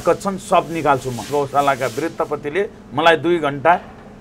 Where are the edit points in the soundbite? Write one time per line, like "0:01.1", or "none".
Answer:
0:01.2